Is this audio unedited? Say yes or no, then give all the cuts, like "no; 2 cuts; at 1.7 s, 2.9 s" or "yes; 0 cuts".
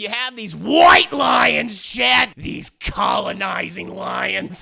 no; 1 cut; at 2.3 s